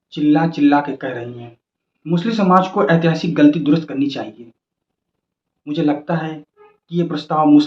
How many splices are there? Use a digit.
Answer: 0